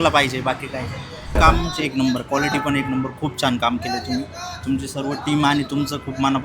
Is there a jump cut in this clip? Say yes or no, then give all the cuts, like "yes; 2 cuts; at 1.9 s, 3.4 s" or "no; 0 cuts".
yes; 1 cut; at 1.4 s